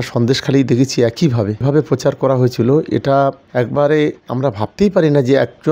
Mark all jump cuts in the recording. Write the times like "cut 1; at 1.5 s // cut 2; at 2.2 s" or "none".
cut 1; at 1.6 s